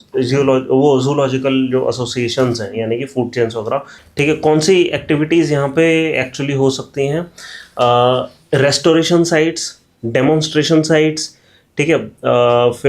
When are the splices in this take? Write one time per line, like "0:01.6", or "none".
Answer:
0:03.9